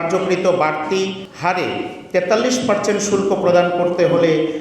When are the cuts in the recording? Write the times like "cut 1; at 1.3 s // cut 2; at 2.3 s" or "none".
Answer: cut 1; at 1.2 s